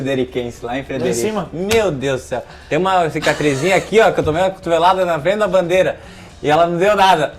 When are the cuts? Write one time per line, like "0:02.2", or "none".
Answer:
none